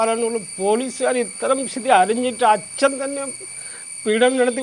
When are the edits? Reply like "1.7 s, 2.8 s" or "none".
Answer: none

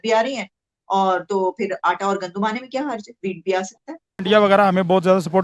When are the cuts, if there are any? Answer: 4.2 s

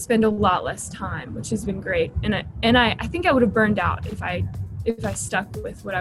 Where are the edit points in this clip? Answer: none

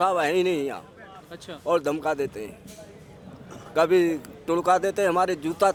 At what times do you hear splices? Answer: none

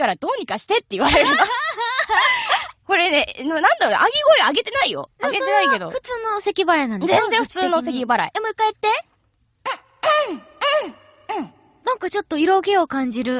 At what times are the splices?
1.8 s

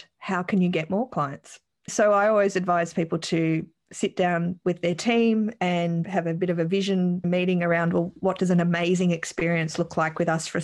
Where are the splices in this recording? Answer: 1.9 s, 6.1 s, 7.2 s, 8.2 s

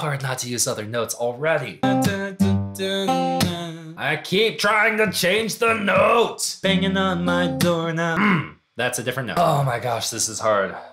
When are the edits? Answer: 1.8 s, 6.5 s, 9.3 s

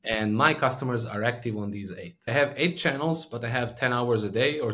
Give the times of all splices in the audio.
2.3 s

